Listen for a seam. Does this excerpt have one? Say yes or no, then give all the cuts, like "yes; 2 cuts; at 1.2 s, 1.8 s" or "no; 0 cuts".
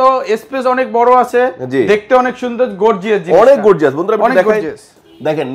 no; 0 cuts